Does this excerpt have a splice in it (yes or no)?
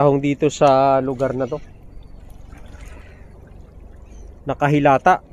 no